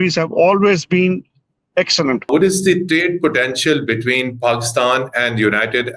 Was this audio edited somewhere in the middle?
yes; 1 cut; at 2.3 s

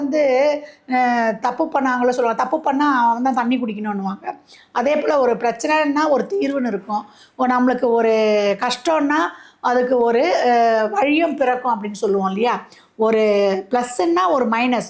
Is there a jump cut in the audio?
no; 0 cuts

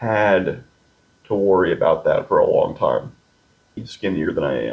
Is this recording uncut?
no; 1 cut; at 3.8 s

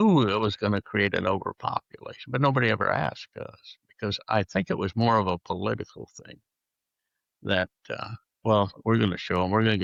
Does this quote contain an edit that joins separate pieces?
no; 0 cuts

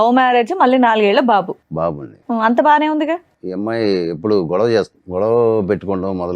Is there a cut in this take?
yes; 2 cuts; at 3.4 s, 5.0 s

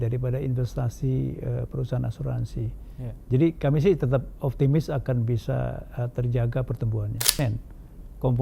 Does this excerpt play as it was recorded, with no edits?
no; 1 cut; at 7.4 s

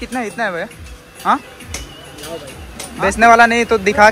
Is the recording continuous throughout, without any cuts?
no; 1 cut; at 2.7 s

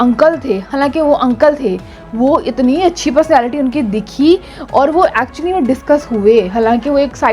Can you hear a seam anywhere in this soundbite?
no; 0 cuts

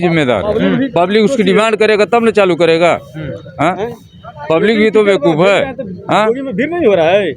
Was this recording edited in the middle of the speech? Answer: no; 0 cuts

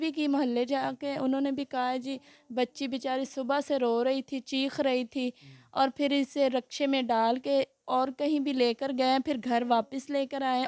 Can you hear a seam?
no; 0 cuts

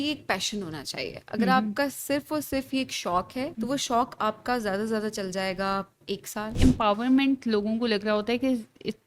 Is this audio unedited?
no; 2 cuts; at 3.5 s, 6.6 s

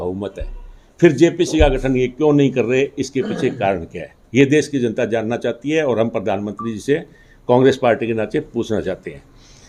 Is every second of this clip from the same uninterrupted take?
yes; 0 cuts

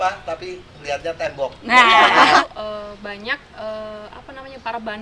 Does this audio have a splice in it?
yes; 1 cut; at 2.4 s

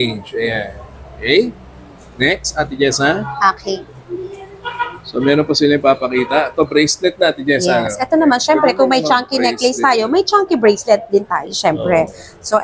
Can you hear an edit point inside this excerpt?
no; 0 cuts

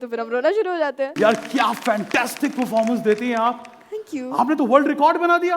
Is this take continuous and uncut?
no; 1 cut; at 1.1 s

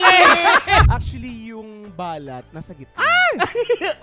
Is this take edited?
yes; 2 cuts; at 0.9 s, 2.8 s

